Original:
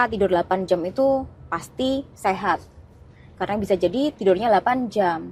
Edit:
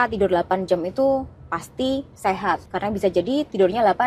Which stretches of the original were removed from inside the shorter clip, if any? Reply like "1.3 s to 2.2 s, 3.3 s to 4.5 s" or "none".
2.7 s to 3.3 s